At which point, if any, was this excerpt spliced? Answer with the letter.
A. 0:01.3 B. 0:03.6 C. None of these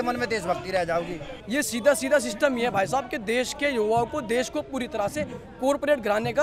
A